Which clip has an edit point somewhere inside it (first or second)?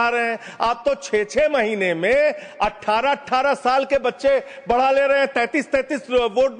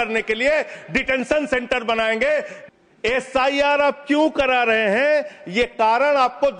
second